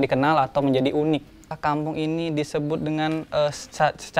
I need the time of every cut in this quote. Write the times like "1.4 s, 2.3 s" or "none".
1.4 s